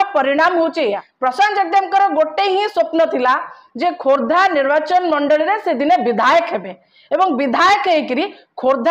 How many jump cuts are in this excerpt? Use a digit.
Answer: 1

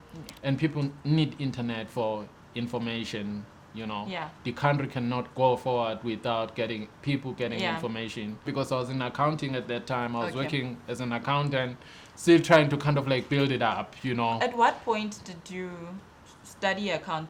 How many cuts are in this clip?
1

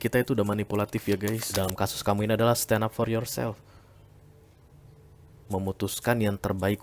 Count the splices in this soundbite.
1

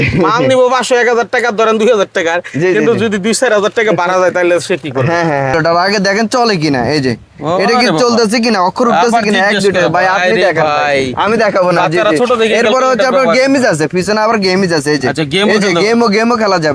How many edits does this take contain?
1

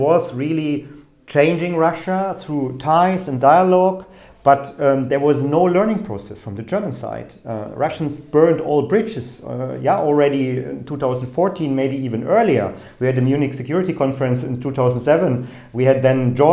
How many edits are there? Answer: 0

